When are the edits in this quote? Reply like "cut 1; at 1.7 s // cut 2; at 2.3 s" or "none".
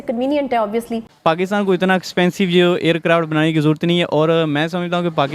cut 1; at 1.0 s